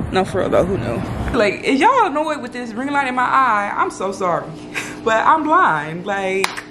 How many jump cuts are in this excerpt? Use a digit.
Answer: 1